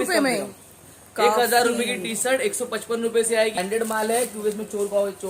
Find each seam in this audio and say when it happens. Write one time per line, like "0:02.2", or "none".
0:03.6